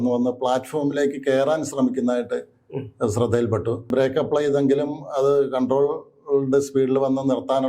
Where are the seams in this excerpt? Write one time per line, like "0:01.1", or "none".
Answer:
0:03.9

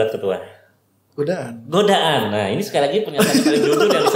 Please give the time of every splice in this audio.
none

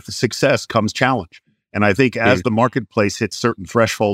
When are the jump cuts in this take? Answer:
none

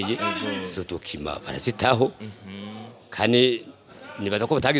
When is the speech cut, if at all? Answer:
none

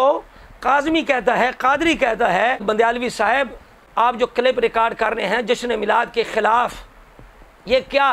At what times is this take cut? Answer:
0:02.6
0:04.2

